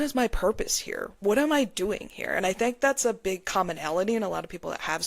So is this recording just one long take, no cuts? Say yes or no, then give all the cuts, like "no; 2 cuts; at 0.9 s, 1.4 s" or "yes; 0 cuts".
yes; 0 cuts